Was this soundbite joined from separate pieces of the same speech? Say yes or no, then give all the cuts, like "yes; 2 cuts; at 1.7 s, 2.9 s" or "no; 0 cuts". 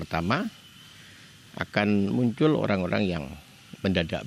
no; 0 cuts